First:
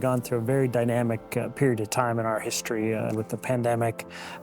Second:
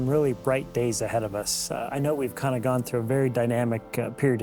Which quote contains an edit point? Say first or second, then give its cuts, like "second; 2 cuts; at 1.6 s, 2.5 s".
first; 1 cut; at 3.1 s